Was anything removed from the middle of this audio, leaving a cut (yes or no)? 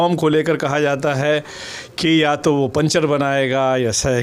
no